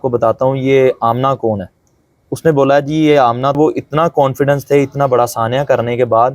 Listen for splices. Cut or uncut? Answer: cut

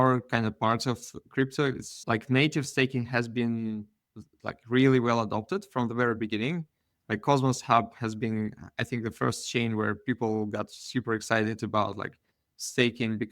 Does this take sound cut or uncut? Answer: cut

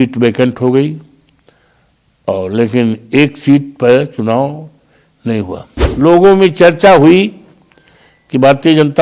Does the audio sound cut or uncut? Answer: cut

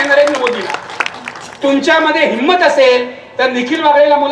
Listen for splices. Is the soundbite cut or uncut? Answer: uncut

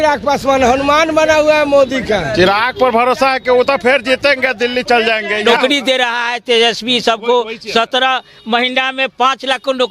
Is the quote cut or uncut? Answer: cut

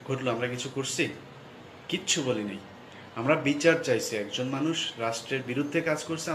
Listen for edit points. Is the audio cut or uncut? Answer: cut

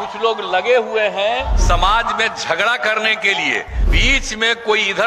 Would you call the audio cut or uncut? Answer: cut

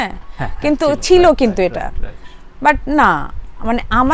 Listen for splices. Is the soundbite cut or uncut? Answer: uncut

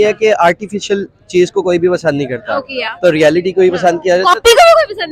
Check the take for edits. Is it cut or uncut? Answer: uncut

